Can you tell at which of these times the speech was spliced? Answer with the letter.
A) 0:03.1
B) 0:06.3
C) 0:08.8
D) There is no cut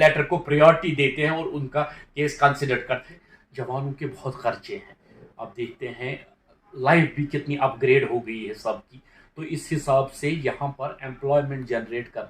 A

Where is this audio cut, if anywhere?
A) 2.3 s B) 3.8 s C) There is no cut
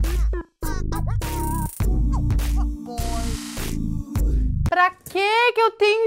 C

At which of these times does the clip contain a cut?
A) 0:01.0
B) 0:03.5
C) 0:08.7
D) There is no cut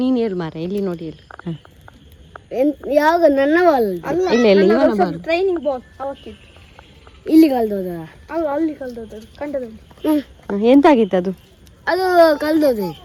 D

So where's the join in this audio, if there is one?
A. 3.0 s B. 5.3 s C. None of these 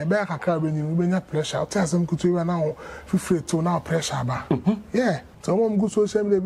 B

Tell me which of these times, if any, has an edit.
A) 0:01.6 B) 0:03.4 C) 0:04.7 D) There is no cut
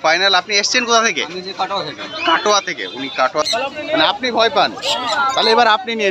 B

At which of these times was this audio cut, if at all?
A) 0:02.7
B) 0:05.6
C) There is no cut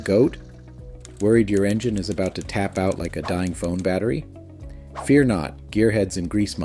B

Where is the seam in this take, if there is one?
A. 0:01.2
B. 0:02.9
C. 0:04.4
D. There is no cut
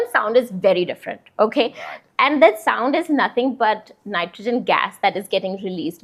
D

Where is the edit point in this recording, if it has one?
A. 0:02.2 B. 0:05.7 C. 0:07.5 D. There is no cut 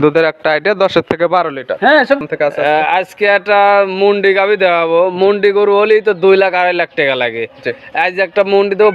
A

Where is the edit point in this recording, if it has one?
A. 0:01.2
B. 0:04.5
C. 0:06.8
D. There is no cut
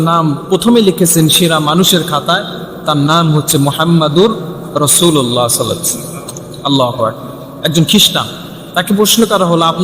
D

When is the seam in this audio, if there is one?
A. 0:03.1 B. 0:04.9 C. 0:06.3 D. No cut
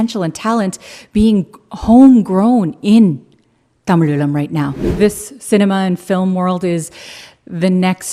B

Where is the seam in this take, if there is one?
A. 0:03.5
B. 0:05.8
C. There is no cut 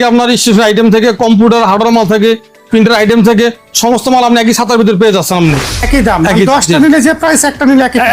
B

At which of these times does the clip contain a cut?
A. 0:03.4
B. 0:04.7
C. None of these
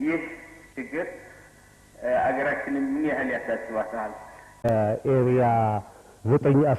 B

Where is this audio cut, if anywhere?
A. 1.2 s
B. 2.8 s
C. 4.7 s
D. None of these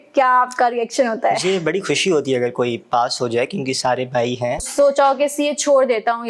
C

